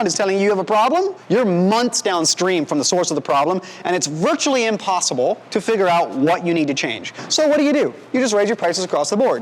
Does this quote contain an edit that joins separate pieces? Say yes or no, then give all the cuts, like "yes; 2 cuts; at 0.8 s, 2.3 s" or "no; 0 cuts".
yes; 2 cuts; at 1.2 s, 5.4 s